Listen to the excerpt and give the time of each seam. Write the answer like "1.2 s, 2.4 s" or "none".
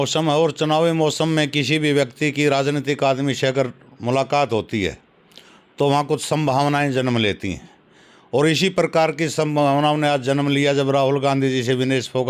none